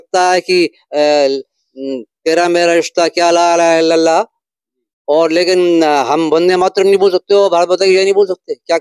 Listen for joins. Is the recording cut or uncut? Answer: uncut